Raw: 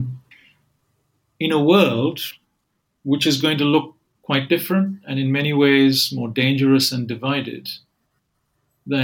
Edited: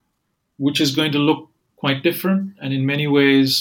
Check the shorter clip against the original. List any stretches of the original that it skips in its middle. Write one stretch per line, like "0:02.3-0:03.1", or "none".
none